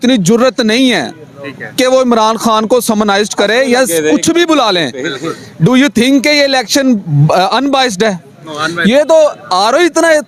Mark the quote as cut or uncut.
uncut